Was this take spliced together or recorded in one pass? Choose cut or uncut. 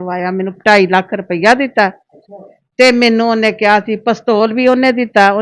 uncut